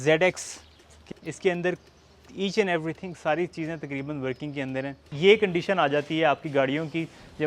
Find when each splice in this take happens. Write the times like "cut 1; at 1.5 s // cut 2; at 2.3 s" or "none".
cut 1; at 1.1 s // cut 2; at 5.0 s